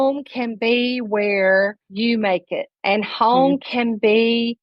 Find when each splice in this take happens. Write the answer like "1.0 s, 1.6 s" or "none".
1.8 s, 2.7 s